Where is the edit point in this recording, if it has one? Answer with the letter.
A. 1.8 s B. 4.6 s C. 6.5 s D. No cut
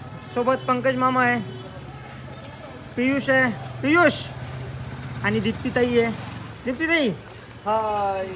D